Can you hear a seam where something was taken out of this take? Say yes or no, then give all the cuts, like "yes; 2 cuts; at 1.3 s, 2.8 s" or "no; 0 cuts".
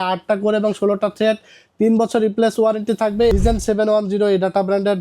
yes; 1 cut; at 3.3 s